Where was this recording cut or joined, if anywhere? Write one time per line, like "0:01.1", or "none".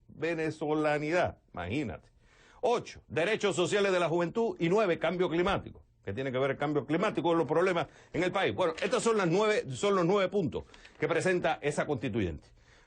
0:10.6